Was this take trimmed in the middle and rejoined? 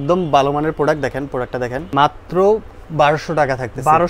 yes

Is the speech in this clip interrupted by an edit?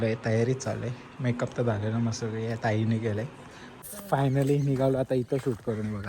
yes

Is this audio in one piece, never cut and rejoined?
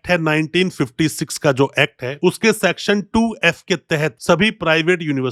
yes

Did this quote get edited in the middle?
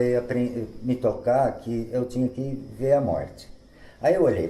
no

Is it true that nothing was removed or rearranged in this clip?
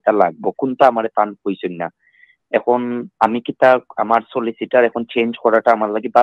yes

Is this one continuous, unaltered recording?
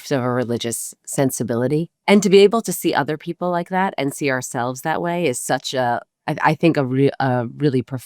no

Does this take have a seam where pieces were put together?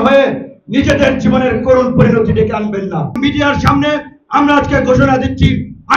yes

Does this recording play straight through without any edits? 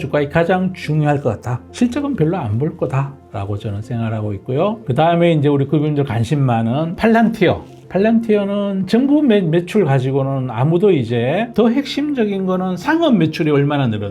no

